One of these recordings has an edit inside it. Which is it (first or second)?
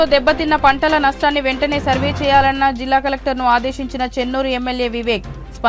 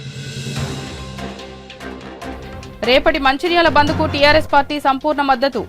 second